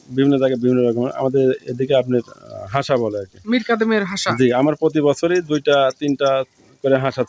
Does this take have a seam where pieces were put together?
no; 0 cuts

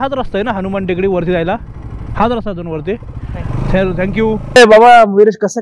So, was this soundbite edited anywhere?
yes; 1 cut; at 4.5 s

